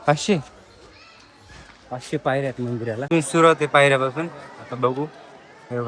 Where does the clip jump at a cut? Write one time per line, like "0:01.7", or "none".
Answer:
0:03.1